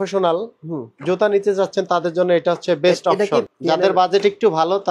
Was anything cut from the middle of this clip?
yes; 1 cut; at 3.5 s

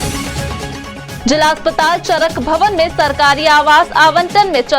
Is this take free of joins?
no; 1 cut; at 1.1 s

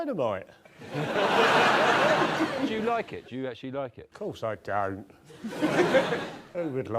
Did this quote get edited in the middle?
no; 0 cuts

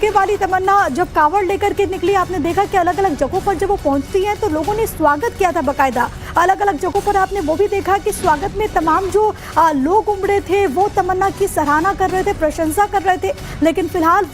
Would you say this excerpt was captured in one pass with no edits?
no; 1 cut; at 4.1 s

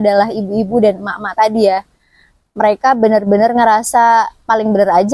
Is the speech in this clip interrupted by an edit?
no; 0 cuts

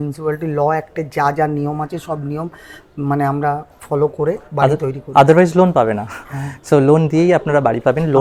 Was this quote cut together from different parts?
no; 0 cuts

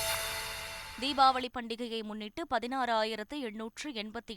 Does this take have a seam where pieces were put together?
no; 0 cuts

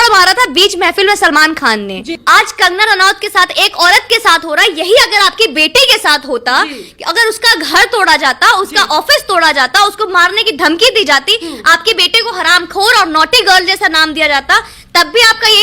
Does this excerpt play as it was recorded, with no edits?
no; 1 cut; at 2.1 s

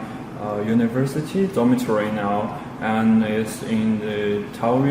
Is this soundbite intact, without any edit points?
no; 1 cut; at 3.9 s

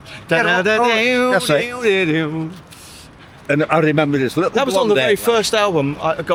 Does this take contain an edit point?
no; 0 cuts

